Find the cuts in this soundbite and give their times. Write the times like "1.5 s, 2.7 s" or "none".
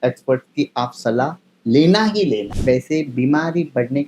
2.5 s